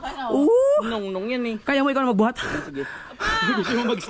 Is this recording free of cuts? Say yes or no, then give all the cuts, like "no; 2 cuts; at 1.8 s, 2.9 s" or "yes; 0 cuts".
yes; 0 cuts